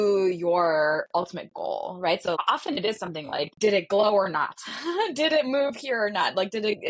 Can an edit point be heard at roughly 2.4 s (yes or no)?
no